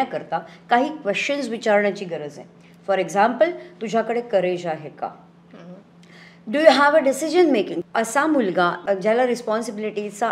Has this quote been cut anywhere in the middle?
yes; 2 cuts; at 7.8 s, 8.8 s

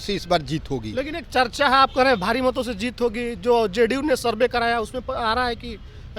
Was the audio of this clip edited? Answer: no; 0 cuts

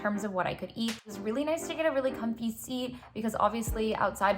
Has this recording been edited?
yes; 1 cut; at 1.0 s

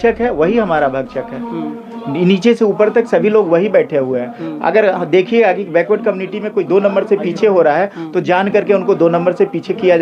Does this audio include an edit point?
no; 0 cuts

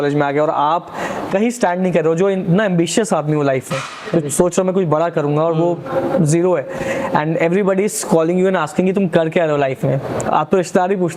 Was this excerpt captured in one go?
yes; 0 cuts

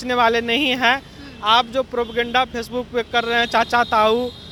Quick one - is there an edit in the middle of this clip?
no; 0 cuts

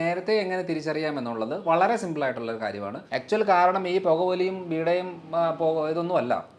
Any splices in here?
yes; 1 cut; at 3.1 s

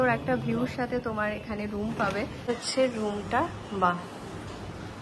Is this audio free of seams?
no; 1 cut; at 2.4 s

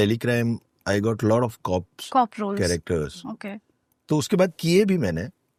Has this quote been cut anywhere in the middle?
no; 0 cuts

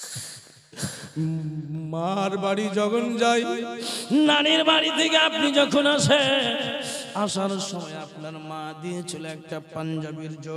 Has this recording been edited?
no; 0 cuts

